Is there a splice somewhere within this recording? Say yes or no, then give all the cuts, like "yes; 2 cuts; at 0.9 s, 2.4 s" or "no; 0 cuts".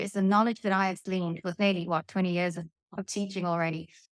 no; 0 cuts